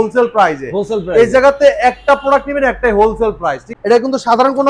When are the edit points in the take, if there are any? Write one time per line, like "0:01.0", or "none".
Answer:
0:03.6